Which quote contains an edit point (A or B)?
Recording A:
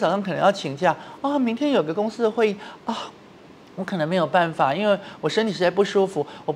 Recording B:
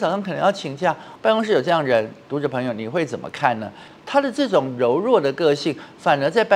B